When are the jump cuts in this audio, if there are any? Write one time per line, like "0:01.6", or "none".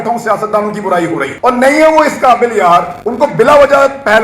0:01.3
0:03.0